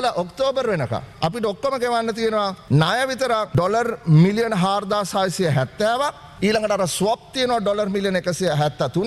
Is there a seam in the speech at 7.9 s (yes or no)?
no